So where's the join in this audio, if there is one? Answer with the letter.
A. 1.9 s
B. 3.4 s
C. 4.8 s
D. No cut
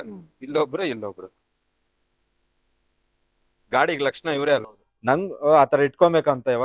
C